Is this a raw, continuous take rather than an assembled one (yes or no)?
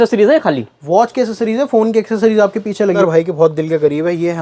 no